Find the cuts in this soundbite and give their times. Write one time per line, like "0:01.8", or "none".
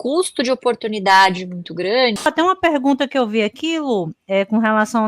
0:02.3